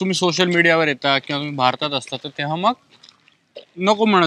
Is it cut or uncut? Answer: uncut